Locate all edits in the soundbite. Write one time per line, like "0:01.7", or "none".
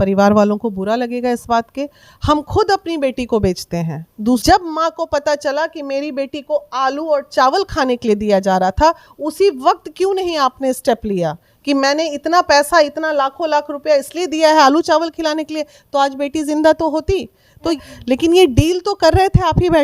0:04.4
0:17.8